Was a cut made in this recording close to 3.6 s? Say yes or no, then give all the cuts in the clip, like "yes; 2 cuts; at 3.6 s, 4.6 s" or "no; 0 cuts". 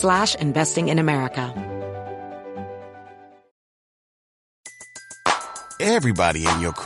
no; 1 cut; at 1.5 s